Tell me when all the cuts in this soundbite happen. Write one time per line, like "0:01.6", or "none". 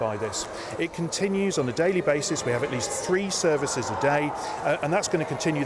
none